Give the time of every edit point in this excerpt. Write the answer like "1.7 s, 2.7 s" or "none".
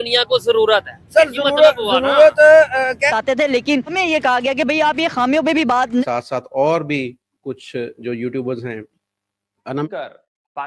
3.1 s, 6.0 s, 9.9 s